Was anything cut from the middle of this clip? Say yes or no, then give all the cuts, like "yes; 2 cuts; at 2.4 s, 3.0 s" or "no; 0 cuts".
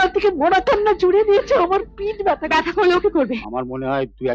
yes; 1 cut; at 3.4 s